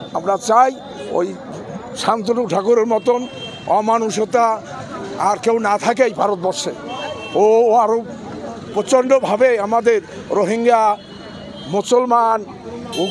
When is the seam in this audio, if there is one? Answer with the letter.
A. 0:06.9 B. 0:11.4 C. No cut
C